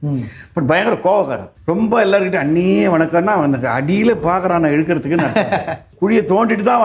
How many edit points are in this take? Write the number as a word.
two